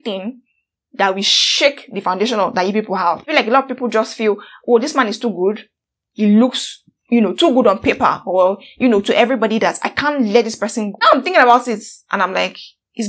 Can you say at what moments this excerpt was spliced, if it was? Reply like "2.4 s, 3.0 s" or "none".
3.3 s, 11.0 s

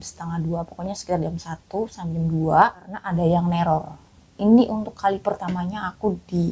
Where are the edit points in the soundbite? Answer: 3.0 s

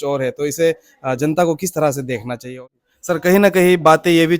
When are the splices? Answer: 2.4 s

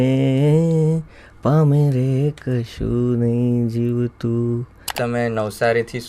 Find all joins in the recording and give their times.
5.0 s

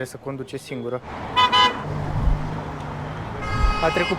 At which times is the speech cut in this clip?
1.1 s, 1.9 s

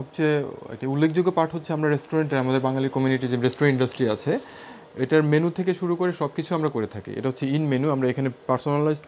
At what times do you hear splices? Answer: none

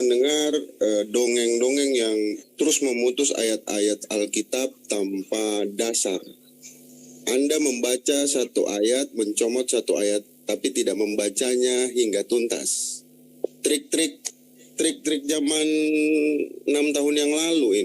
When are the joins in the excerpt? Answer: none

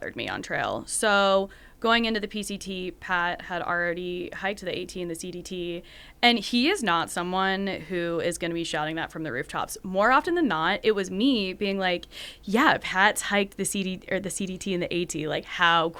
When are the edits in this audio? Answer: none

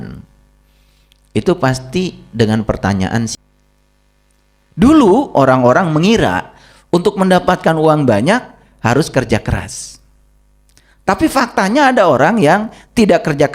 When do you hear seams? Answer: 3.3 s

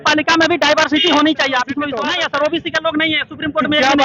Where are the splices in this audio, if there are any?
1.9 s

